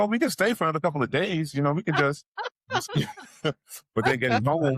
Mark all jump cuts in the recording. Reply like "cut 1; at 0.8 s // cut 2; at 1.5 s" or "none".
cut 1; at 2.5 s